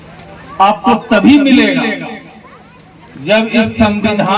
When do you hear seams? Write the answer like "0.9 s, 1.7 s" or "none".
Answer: none